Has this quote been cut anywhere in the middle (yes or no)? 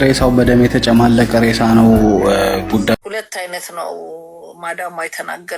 yes